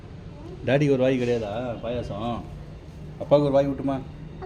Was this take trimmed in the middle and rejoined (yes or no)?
no